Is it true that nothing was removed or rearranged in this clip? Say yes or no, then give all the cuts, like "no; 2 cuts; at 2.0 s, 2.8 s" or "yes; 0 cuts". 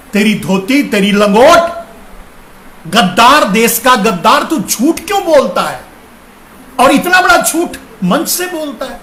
yes; 0 cuts